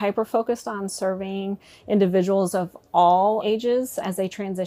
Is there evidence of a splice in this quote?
no; 0 cuts

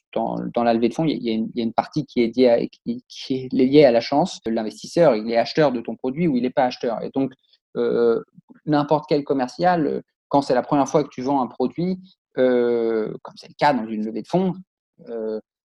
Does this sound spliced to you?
yes; 1 cut; at 4.5 s

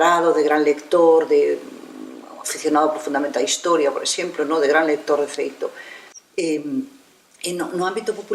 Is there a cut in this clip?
no; 0 cuts

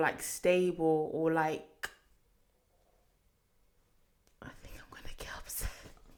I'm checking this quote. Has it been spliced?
no; 0 cuts

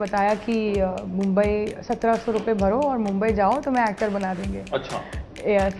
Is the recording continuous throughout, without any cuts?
yes; 0 cuts

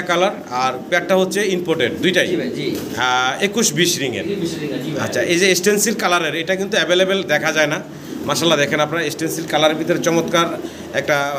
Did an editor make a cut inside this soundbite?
no; 0 cuts

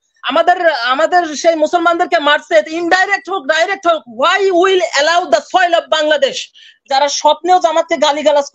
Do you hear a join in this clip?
yes; 1 cut; at 6.9 s

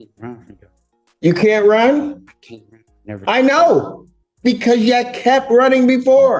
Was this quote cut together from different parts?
no; 0 cuts

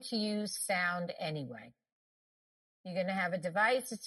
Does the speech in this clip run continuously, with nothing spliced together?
yes; 0 cuts

